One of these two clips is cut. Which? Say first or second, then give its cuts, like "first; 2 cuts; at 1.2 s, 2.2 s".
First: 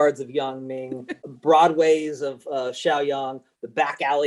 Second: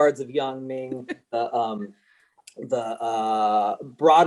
first; 1 cut; at 1.3 s